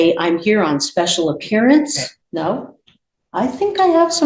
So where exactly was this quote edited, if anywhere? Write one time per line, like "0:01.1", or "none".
0:02.1